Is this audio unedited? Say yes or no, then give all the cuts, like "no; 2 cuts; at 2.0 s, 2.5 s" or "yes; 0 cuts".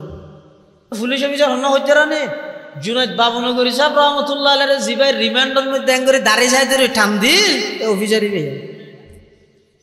no; 1 cut; at 1.0 s